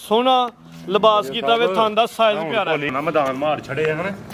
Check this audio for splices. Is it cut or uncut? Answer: cut